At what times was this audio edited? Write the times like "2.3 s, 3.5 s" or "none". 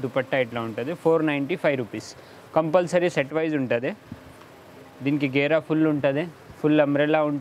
none

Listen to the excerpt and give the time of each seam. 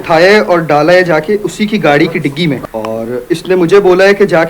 2.6 s

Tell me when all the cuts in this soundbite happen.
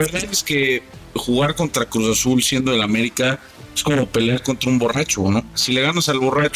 5.6 s

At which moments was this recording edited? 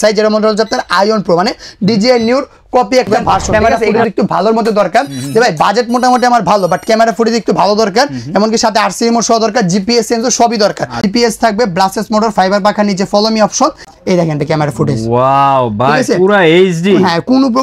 3.5 s, 11.0 s, 13.9 s

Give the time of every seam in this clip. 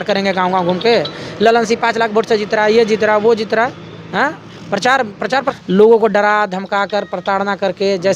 5.5 s

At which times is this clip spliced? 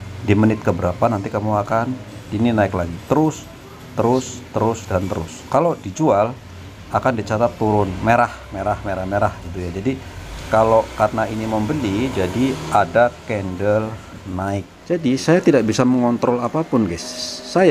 14.7 s

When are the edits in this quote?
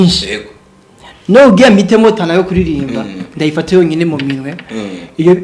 none

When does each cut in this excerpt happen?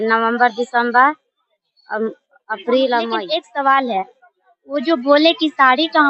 3.2 s

